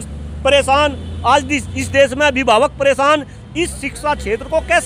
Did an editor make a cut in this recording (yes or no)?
no